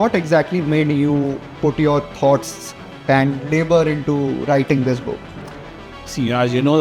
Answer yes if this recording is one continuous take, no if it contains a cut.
yes